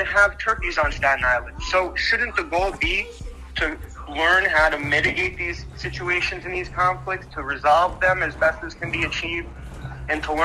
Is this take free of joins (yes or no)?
no